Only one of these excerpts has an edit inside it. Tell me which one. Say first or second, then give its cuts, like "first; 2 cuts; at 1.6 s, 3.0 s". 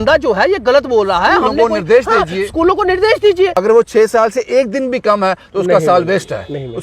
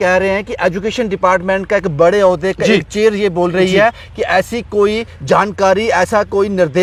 first; 1 cut; at 3.5 s